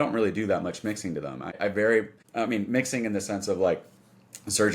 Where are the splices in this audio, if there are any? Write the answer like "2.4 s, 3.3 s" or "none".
1.6 s, 2.2 s